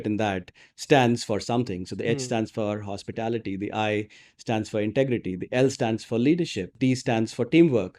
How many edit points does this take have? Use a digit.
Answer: 1